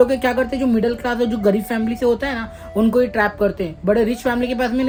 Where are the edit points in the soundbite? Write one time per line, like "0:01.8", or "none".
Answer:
none

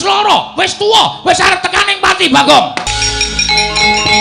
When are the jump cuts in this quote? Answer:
0:03.0

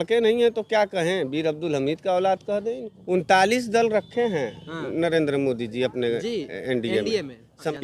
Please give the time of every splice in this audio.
0:02.9

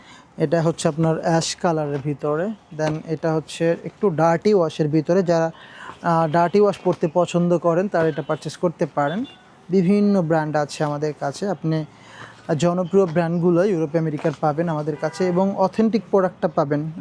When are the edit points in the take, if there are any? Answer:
none

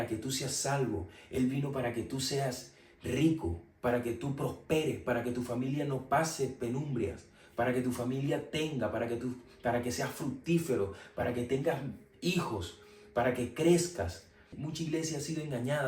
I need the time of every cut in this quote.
0:14.6

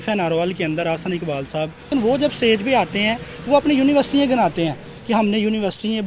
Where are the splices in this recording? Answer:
0:01.9

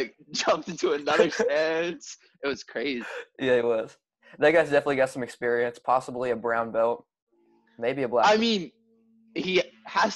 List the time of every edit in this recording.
none

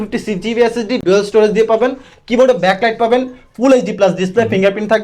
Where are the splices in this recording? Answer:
none

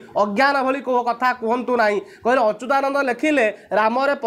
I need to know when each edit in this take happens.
none

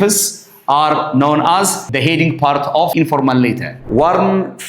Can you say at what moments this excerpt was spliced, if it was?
0:01.8
0:02.9
0:03.7

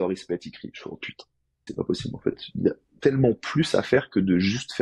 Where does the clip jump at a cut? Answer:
0:01.7

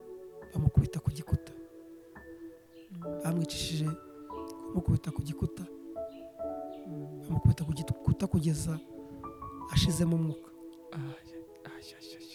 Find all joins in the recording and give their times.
none

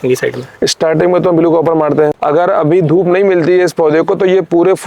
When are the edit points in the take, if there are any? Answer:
0:02.2

